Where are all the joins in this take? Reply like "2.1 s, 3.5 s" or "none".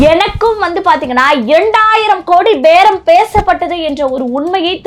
none

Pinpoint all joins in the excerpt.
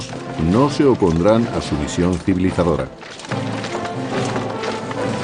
3.6 s

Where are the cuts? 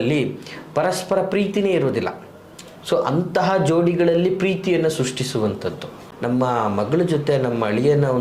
6.0 s

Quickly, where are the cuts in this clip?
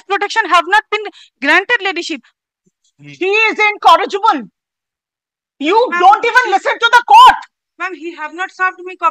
2.3 s

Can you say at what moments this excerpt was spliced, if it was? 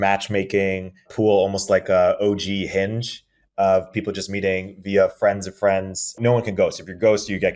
1.1 s, 6.2 s

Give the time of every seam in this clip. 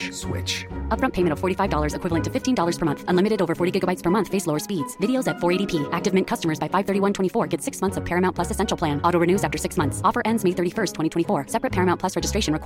none

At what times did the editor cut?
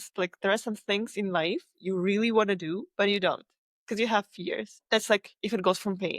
4.8 s

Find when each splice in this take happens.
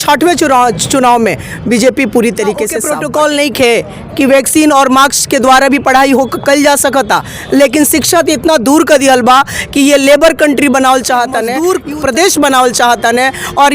2.8 s, 11.5 s

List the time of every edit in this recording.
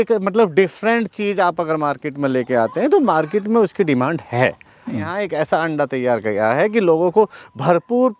4.9 s

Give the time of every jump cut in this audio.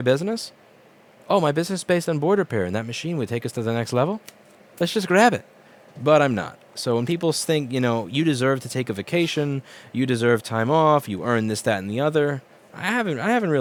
none

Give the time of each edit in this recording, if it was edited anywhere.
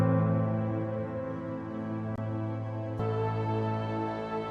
2.2 s

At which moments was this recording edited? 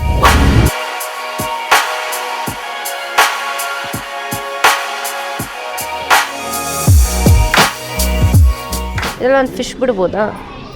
9.0 s

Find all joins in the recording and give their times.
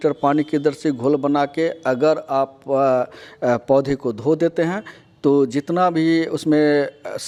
none

